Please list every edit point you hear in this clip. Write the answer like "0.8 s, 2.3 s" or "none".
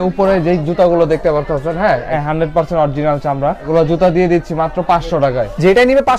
2.1 s, 3.6 s